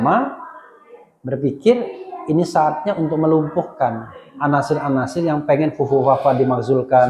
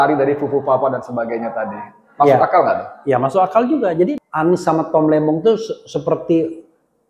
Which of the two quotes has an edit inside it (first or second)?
second